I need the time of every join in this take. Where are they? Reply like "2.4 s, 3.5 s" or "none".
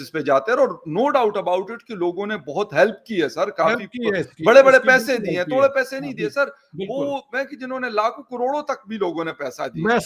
none